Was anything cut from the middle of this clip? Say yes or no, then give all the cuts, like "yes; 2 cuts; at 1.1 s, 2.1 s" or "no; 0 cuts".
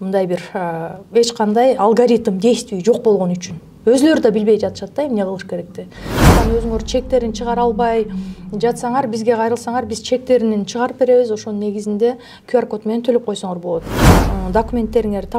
yes; 2 cuts; at 6.3 s, 14.2 s